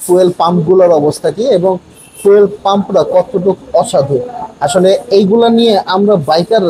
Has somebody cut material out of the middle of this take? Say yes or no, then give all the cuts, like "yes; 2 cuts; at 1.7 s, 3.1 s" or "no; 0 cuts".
no; 0 cuts